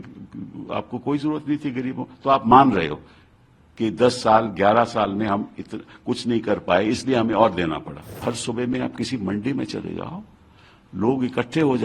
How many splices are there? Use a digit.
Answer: 1